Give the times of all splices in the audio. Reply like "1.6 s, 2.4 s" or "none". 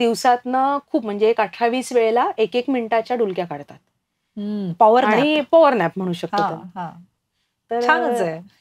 none